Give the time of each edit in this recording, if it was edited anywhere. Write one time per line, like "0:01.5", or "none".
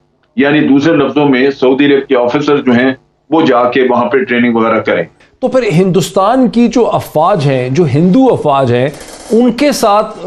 0:05.2